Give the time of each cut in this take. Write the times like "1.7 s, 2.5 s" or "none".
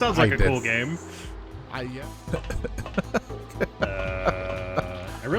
1.6 s